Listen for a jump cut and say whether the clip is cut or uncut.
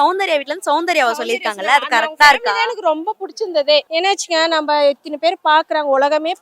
cut